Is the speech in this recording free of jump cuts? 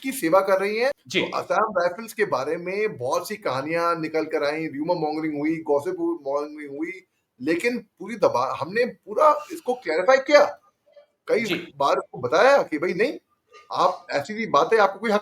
no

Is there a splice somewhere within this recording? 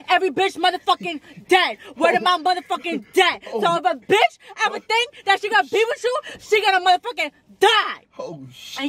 no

